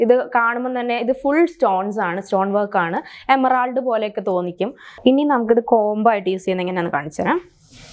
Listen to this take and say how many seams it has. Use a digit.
1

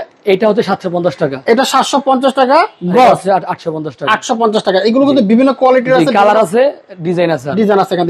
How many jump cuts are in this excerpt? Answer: 0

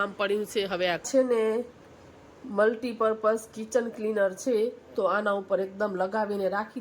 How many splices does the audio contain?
1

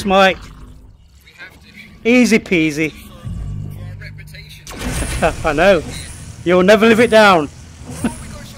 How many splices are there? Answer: 0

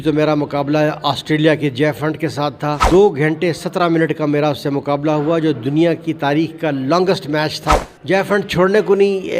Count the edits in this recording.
2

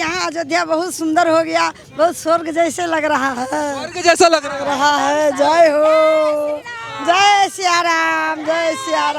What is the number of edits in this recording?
0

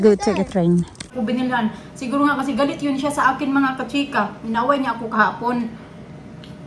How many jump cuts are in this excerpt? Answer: 1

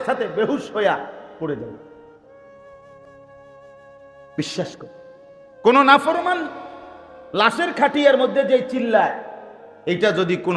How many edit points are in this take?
0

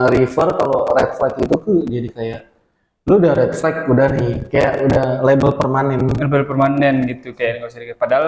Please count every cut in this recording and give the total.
0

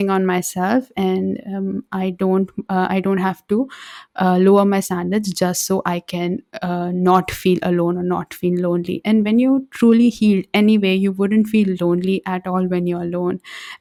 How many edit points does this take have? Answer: 0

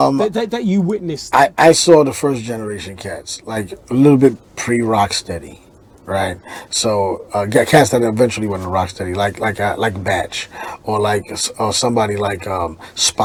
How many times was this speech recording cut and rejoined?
0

